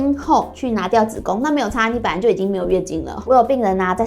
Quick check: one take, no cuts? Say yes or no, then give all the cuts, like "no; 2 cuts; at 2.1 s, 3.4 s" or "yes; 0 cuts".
no; 1 cut; at 3.2 s